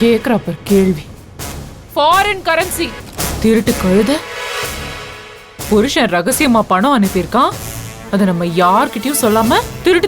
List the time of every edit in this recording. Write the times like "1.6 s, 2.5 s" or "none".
3.1 s